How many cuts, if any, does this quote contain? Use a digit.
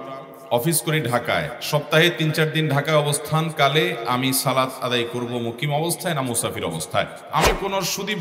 1